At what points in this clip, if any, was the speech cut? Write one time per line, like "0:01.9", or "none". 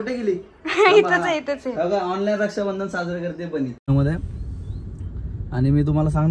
0:03.8